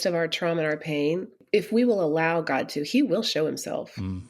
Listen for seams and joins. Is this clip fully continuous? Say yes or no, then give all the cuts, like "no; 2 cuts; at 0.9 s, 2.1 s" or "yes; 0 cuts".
no; 1 cut; at 1.4 s